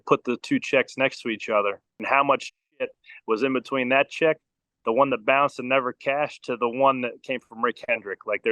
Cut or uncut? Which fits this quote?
cut